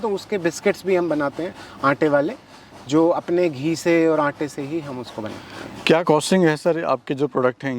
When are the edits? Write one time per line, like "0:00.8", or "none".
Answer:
none